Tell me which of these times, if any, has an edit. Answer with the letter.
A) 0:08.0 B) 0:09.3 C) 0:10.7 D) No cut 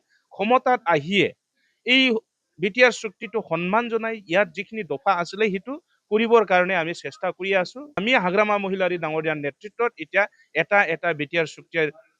A